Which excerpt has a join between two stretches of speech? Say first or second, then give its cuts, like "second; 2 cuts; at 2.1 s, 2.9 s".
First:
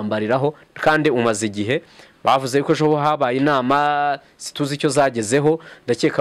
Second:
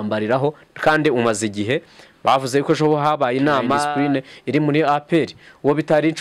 second; 1 cut; at 3.9 s